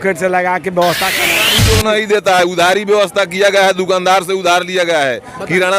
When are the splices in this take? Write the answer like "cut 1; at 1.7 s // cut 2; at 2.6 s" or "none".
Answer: cut 1; at 1.4 s

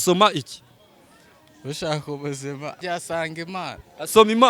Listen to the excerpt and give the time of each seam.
cut 1; at 2.8 s

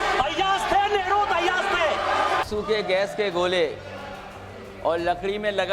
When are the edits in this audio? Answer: cut 1; at 2.4 s

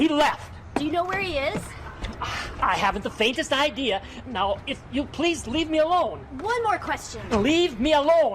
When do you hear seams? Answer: cut 1; at 7.1 s

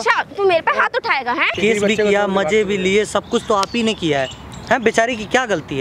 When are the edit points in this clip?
cut 1; at 1.5 s

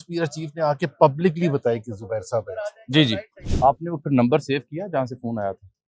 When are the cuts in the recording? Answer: cut 1; at 3.4 s

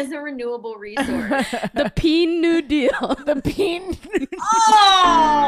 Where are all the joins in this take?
cut 1; at 4.3 s

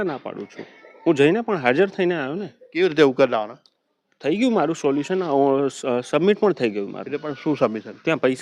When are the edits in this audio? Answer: none

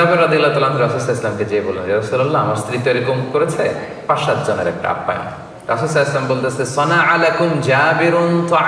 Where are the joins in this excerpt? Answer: none

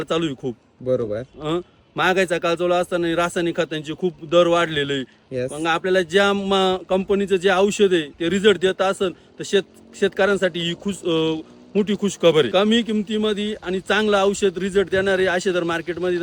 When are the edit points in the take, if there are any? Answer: cut 1; at 12.5 s

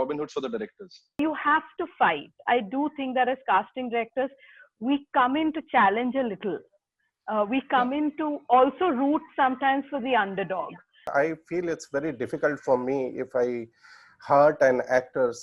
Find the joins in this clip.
cut 1; at 1.2 s // cut 2; at 11.1 s

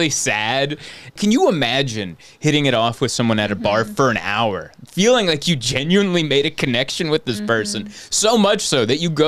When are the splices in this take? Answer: cut 1; at 1.2 s

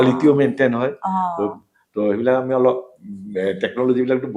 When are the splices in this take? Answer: none

